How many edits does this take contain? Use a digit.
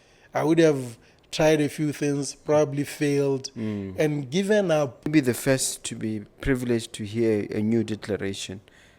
1